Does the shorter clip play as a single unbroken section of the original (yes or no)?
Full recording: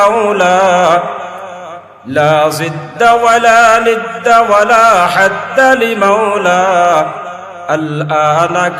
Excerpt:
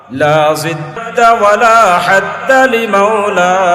no